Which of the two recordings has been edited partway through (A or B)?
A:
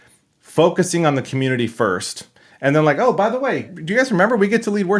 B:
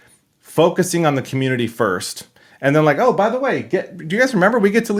A